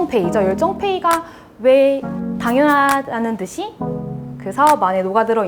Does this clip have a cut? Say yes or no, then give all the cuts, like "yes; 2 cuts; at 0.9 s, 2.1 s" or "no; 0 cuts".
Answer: no; 0 cuts